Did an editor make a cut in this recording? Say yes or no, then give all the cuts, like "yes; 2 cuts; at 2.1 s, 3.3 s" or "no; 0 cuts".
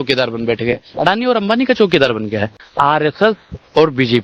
yes; 1 cut; at 2.7 s